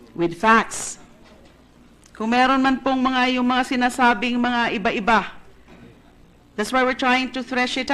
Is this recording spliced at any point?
yes; 1 cut; at 4.5 s

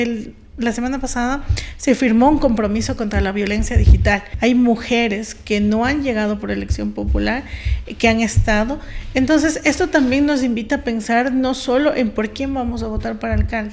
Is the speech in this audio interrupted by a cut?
yes; 1 cut; at 4.3 s

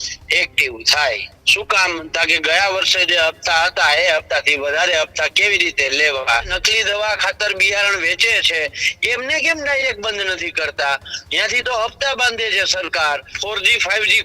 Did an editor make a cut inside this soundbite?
yes; 3 cuts; at 1.4 s, 6.5 s, 13.3 s

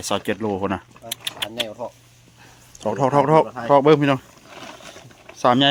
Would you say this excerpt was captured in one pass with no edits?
yes; 0 cuts

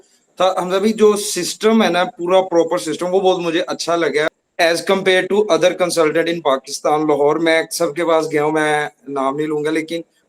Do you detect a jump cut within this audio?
yes; 1 cut; at 4.3 s

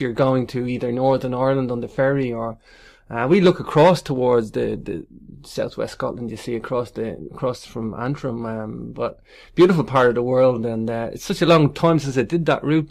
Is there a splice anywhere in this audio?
no; 0 cuts

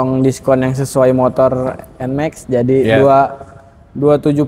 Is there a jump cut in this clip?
no; 0 cuts

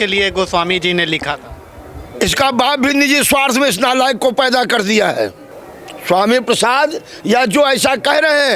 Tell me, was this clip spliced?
no; 0 cuts

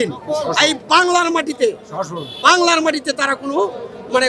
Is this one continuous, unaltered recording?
yes; 0 cuts

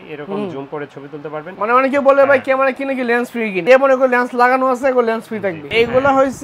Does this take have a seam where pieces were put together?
yes; 3 cuts; at 1.5 s, 3.6 s, 5.7 s

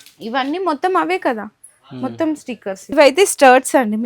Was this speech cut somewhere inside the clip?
yes; 1 cut; at 2.9 s

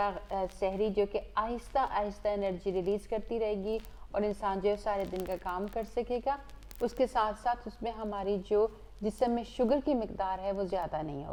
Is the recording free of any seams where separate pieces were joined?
yes; 0 cuts

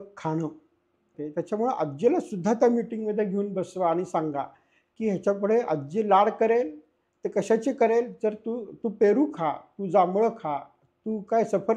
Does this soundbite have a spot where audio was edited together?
yes; 1 cut; at 1.2 s

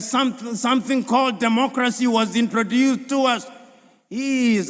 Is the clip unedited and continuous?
yes; 0 cuts

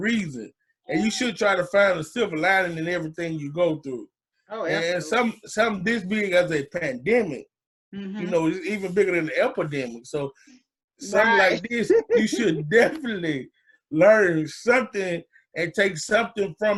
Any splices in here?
no; 0 cuts

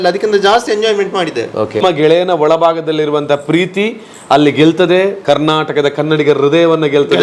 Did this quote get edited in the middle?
yes; 1 cut; at 1.8 s

